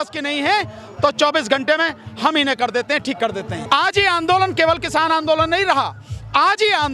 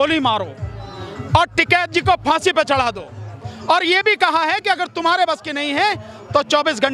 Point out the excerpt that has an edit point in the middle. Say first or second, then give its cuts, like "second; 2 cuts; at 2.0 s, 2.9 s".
first; 1 cut; at 3.5 s